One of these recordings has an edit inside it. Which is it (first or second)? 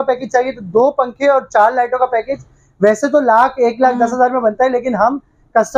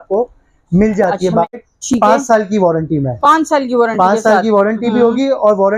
second